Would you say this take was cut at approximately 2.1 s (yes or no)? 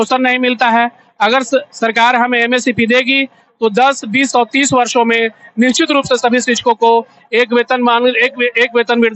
no